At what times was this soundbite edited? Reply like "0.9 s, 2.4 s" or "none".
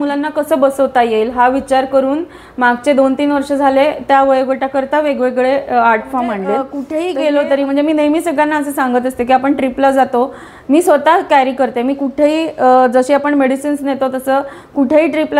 6.9 s